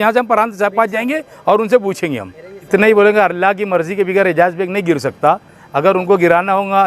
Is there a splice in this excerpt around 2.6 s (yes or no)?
yes